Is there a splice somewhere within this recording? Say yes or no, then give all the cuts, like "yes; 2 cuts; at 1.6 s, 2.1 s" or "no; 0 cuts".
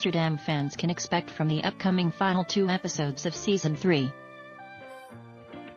yes; 1 cut; at 4.1 s